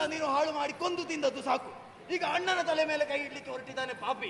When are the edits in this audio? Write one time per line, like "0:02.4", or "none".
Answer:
none